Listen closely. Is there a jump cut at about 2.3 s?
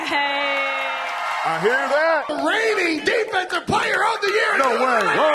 yes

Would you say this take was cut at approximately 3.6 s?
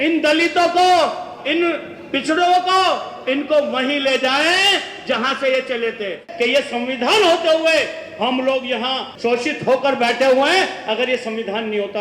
no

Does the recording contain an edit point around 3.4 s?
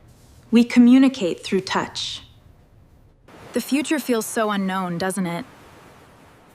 yes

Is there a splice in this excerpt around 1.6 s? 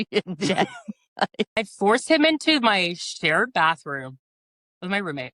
yes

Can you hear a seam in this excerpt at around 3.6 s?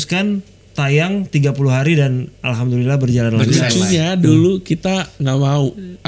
yes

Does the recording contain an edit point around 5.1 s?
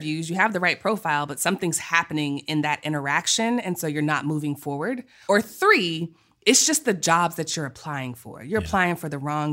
yes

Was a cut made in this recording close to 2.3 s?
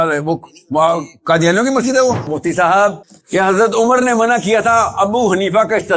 yes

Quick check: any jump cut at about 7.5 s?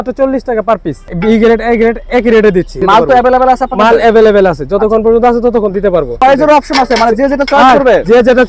no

